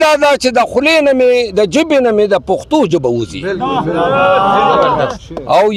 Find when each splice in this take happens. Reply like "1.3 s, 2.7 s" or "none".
none